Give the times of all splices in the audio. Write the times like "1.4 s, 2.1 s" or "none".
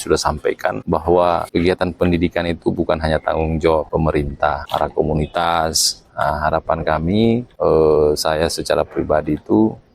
0.8 s, 1.5 s, 4.2 s, 7.5 s